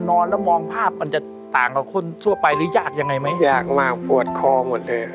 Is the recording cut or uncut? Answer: uncut